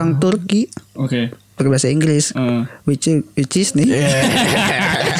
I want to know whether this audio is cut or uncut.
uncut